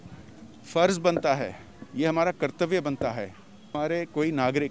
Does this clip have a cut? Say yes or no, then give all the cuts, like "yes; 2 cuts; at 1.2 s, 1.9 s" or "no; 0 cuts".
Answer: yes; 1 cut; at 3.7 s